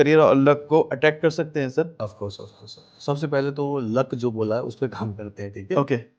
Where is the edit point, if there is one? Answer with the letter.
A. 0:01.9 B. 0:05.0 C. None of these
A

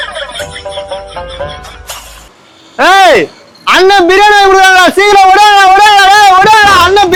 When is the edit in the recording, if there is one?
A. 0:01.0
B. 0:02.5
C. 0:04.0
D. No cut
D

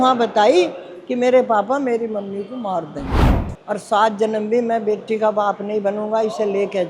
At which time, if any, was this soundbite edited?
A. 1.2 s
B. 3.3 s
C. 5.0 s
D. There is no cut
B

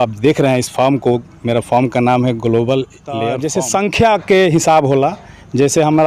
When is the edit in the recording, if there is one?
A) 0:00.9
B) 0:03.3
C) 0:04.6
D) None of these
B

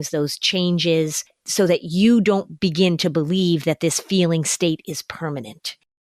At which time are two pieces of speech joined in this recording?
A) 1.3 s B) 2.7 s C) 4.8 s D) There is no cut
D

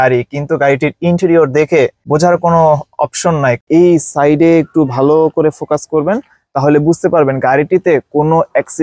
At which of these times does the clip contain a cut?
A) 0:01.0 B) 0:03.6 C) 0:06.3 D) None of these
B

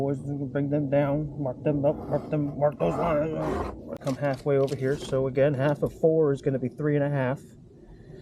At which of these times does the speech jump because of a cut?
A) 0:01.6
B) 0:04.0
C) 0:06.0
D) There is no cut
B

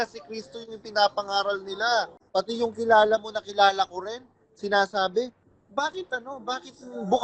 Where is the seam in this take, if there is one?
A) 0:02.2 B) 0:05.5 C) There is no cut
A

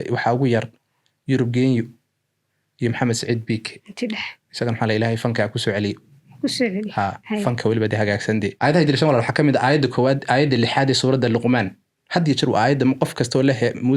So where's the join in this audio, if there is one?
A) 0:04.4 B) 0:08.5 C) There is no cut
B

